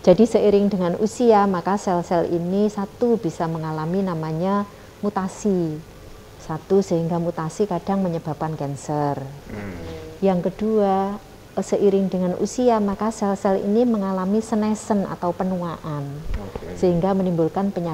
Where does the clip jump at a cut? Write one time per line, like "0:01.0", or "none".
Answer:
none